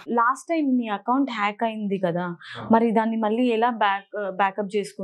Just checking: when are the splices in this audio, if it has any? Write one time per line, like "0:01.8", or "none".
none